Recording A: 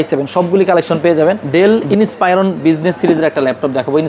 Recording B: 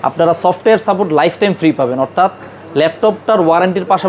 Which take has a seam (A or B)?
A